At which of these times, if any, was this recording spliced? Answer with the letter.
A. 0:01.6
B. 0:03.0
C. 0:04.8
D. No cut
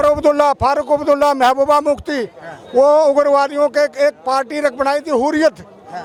D